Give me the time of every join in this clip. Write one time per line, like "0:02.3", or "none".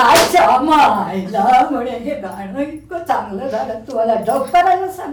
none